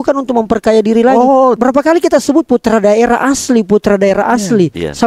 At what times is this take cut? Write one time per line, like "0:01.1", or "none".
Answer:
0:01.6